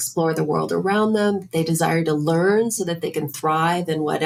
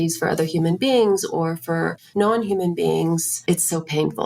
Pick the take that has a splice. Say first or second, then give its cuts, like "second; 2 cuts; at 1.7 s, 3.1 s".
second; 2 cuts; at 2.0 s, 3.3 s